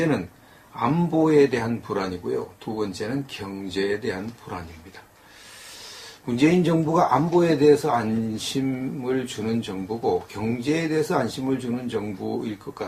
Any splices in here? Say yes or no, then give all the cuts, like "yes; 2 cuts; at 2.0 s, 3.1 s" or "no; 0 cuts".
no; 0 cuts